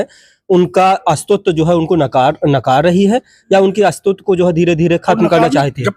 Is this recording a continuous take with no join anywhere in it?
yes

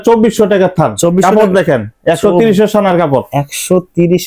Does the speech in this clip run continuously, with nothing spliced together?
yes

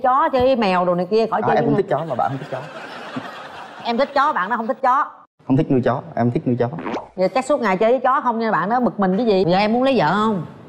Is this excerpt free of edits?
no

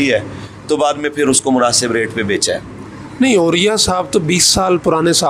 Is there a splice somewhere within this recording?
no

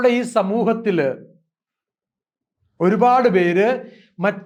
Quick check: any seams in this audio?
no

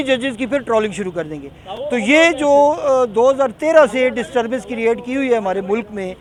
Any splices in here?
no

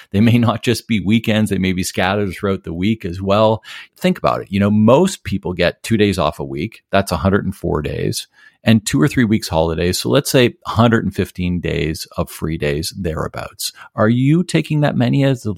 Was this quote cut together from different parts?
no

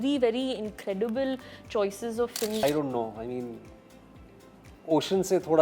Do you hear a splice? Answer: yes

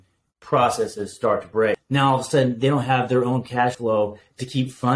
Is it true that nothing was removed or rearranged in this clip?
no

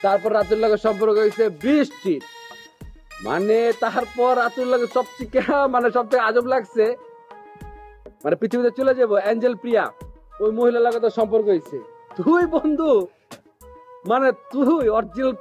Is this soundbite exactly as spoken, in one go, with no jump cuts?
yes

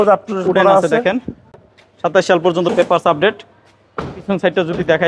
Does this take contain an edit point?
no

